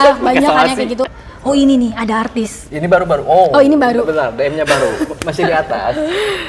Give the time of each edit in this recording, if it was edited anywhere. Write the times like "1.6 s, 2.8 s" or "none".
1.2 s